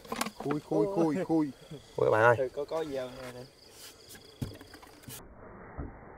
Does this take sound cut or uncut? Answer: uncut